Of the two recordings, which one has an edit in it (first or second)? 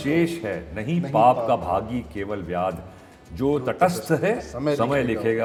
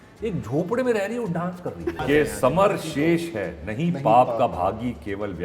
second